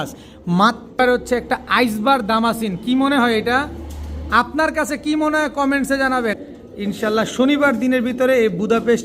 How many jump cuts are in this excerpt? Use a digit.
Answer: 2